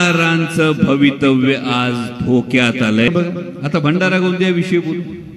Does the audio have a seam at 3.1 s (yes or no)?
yes